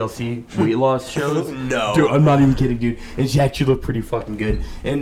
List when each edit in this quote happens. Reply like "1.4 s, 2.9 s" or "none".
none